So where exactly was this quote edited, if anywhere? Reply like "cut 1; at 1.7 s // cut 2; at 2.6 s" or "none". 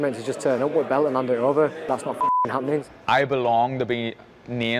cut 1; at 1.8 s // cut 2; at 2.9 s